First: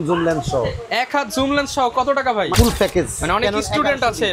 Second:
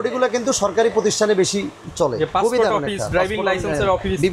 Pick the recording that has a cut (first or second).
first